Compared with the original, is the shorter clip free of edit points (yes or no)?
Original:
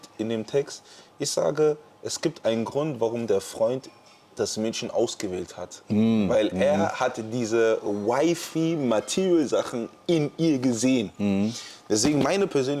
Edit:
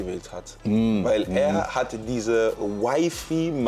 yes